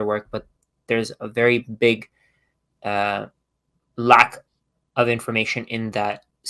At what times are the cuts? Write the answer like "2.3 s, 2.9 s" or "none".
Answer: none